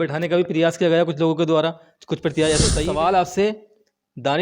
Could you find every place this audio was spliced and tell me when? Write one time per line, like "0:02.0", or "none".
0:02.8

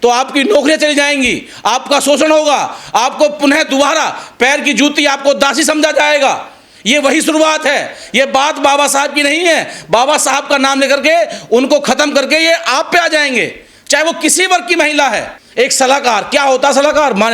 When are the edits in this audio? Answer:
0:15.4

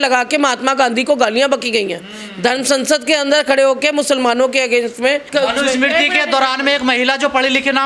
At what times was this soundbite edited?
0:05.3

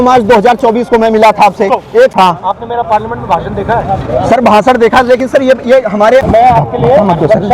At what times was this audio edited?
0:02.1
0:06.3

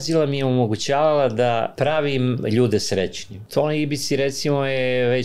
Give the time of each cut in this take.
0:01.7
0:03.3

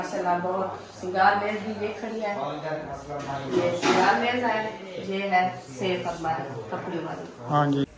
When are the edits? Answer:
none

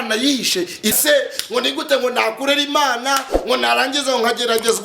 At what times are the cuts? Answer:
0:01.0

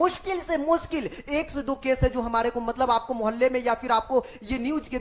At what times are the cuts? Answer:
none

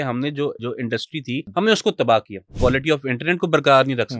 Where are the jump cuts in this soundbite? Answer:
0:01.0
0:02.5

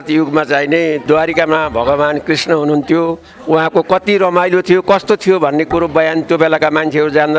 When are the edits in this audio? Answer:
0:01.0

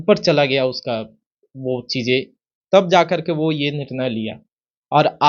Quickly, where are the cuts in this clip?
none

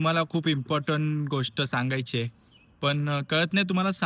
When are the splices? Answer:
none

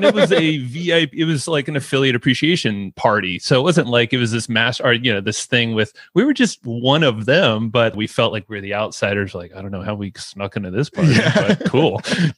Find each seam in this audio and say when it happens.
0:07.9

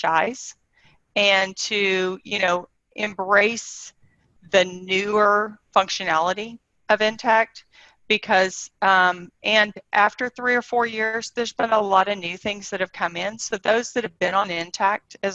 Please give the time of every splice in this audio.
none

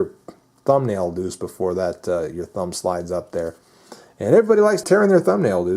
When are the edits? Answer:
0:04.8

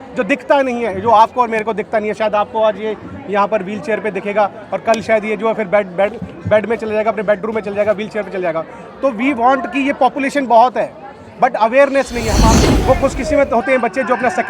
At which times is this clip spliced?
0:12.6

